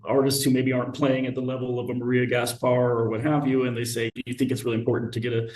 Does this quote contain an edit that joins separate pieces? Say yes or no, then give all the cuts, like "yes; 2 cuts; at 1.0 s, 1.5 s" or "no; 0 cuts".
yes; 1 cut; at 4.1 s